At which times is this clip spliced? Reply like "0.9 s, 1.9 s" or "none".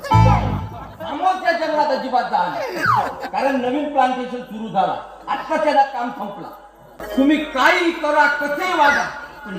6.9 s